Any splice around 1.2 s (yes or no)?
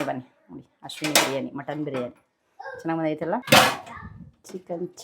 no